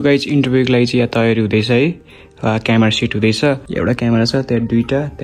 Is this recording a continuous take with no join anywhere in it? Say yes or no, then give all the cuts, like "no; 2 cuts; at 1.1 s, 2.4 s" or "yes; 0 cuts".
no; 1 cut; at 3.7 s